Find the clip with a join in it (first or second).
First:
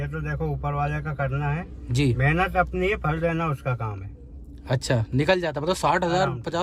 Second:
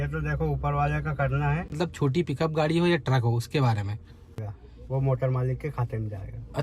second